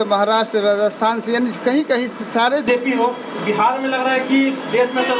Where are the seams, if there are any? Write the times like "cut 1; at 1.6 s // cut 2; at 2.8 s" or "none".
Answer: cut 1; at 2.6 s